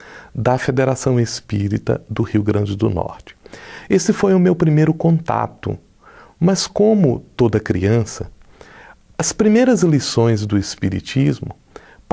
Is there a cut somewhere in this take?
yes; 1 cut; at 3.8 s

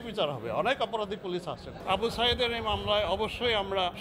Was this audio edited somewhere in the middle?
yes; 1 cut; at 1.8 s

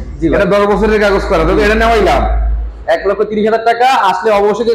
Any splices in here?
no; 0 cuts

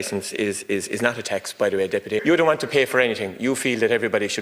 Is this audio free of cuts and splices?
no; 1 cut; at 2.2 s

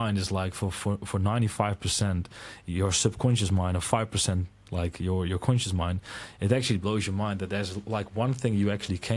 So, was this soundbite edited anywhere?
no; 0 cuts

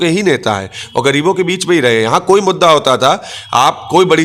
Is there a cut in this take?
no; 0 cuts

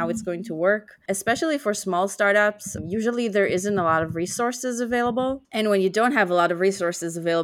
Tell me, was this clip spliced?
yes; 2 cuts; at 1.0 s, 2.7 s

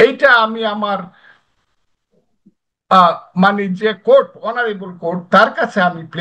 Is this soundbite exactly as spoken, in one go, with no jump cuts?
yes; 0 cuts

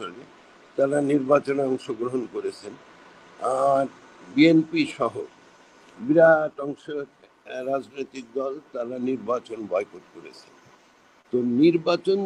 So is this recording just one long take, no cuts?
yes; 0 cuts

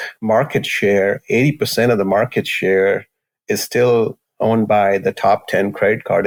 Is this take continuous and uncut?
yes; 0 cuts

